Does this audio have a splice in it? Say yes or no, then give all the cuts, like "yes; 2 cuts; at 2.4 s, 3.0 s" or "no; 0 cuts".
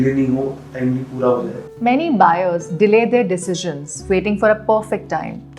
yes; 1 cut; at 1.6 s